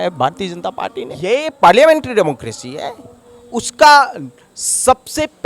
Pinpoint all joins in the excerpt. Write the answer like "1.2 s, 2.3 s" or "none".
1.1 s